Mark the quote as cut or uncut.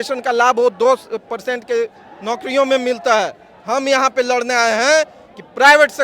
uncut